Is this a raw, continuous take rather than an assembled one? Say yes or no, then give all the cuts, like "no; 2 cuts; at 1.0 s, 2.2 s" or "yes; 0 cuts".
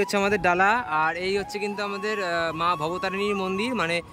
yes; 0 cuts